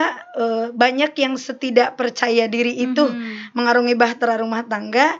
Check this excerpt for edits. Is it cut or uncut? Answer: uncut